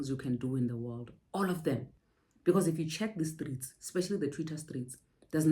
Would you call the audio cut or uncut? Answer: cut